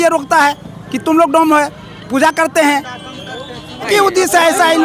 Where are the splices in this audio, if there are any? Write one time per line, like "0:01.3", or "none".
0:03.9